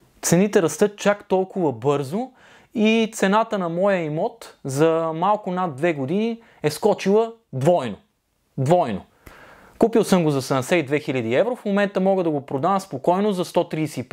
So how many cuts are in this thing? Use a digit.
0